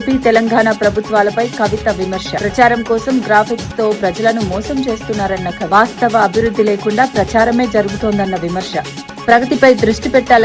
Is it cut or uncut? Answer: uncut